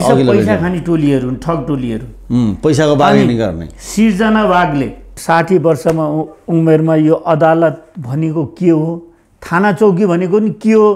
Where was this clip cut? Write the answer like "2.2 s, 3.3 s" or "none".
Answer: 5.1 s